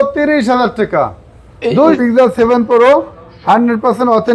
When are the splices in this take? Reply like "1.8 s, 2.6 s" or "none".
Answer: 2.0 s